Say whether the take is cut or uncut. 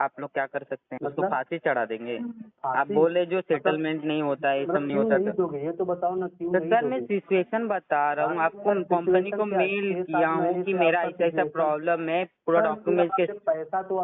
cut